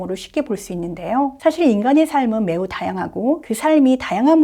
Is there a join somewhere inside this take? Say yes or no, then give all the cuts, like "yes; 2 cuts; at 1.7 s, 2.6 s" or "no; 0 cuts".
yes; 2 cuts; at 1.4 s, 3.5 s